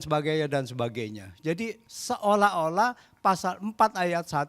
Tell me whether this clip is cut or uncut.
cut